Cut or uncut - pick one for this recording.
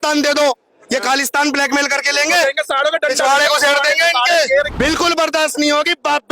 cut